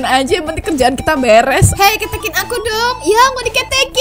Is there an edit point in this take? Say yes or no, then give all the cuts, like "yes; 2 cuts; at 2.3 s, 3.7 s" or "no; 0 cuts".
yes; 1 cut; at 1.7 s